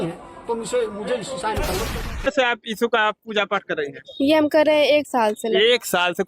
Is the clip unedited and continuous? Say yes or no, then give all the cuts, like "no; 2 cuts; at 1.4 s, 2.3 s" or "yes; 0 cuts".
no; 1 cut; at 2.3 s